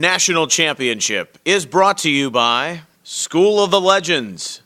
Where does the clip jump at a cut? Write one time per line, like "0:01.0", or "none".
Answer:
none